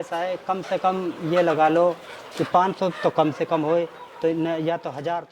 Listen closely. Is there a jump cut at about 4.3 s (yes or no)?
no